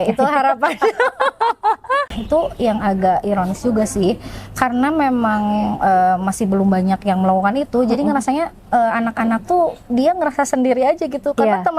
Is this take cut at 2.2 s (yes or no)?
yes